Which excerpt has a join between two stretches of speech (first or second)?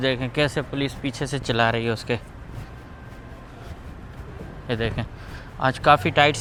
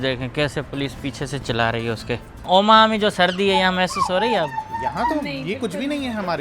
second